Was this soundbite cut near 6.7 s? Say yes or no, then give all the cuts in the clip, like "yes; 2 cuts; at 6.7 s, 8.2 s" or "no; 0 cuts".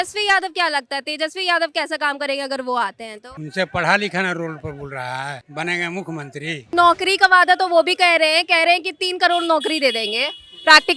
yes; 1 cut; at 6.7 s